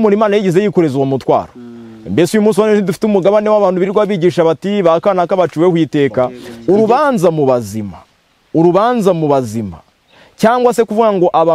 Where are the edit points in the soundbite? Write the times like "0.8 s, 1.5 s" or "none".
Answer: 6.5 s